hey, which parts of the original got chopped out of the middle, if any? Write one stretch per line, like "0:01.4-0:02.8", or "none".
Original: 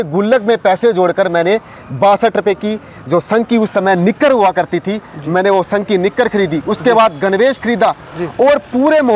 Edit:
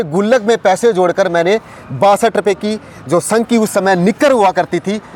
none